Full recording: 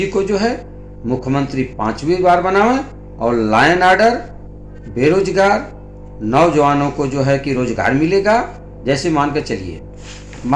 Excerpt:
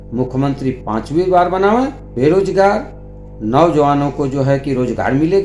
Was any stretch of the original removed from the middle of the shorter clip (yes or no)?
yes